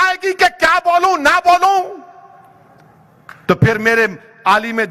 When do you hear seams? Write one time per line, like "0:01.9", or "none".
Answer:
none